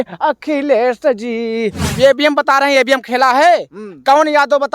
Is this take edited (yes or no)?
yes